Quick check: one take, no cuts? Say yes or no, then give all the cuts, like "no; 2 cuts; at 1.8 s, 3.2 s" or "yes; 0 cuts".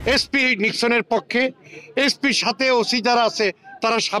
yes; 0 cuts